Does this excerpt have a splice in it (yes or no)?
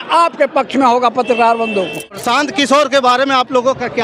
yes